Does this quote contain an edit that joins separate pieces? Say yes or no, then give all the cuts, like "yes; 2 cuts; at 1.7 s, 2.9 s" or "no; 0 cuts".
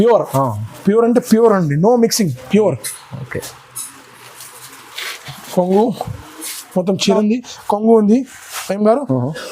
yes; 1 cut; at 7.2 s